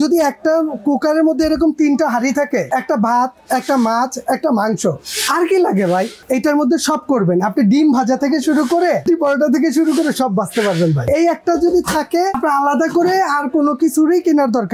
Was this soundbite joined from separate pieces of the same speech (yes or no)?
yes